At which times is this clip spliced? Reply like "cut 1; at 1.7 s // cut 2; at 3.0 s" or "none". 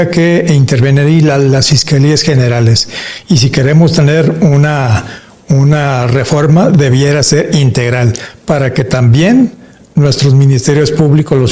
none